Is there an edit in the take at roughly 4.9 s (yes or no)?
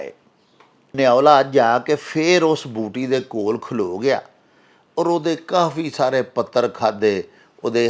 no